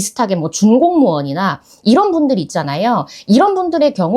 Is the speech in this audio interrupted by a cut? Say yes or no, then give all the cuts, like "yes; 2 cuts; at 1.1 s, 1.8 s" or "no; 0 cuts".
no; 0 cuts